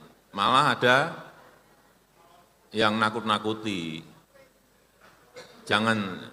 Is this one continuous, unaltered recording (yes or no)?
yes